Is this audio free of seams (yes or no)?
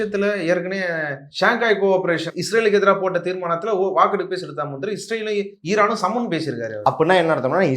no